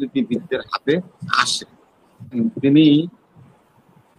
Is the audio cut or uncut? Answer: cut